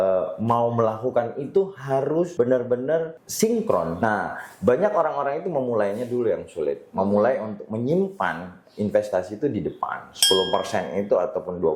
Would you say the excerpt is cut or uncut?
cut